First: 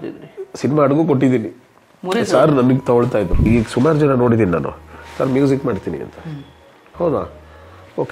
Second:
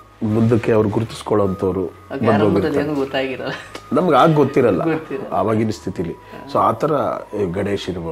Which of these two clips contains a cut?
first; 1 cut; at 3.5 s

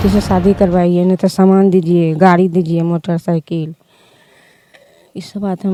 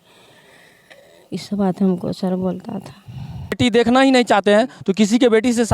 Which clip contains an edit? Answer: second; 1 cut; at 3.6 s

